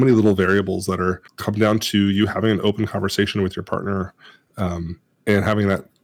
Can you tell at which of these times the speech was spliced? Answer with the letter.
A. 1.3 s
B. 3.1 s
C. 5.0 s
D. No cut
A